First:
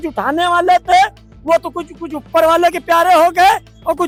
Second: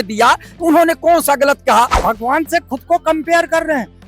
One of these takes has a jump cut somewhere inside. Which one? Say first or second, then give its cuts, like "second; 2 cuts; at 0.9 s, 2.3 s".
second; 1 cut; at 1.9 s